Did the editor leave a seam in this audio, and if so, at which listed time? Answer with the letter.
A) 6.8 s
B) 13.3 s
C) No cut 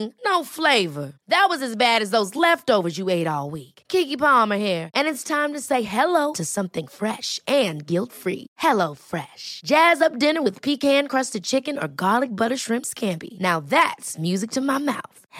C